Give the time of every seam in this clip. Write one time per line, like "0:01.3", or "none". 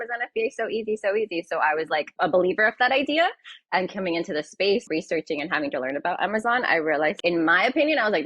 0:02.1
0:04.8
0:07.2